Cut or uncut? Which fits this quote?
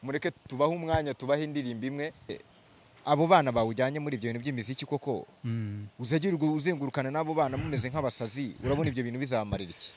cut